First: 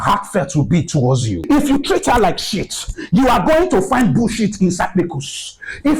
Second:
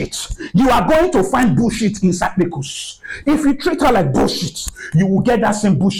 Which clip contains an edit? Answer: first; 1 cut; at 1.5 s

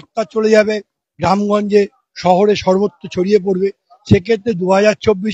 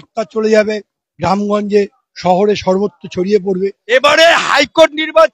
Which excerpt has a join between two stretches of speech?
second; 1 cut; at 3.8 s

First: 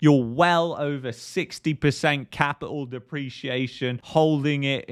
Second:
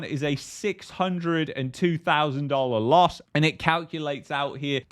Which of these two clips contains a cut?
second; 1 cut; at 3.2 s

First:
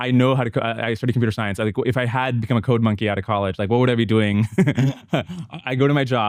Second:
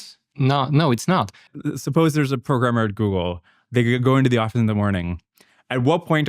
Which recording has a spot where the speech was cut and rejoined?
second; 1 cut; at 1.4 s

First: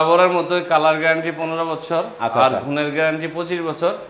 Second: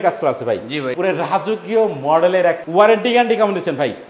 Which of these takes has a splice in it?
second; 2 cuts; at 0.9 s, 2.6 s

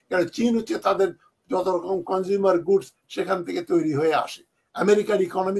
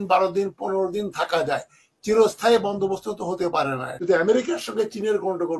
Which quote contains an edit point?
second; 1 cut; at 3.9 s

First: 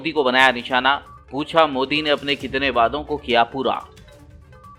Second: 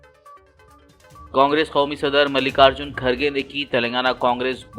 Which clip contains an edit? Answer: second; 1 cut; at 1.1 s

